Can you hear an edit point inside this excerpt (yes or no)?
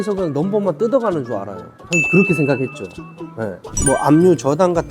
yes